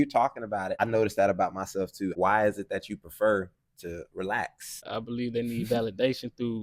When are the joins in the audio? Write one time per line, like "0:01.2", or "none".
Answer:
0:00.8
0:02.1
0:04.8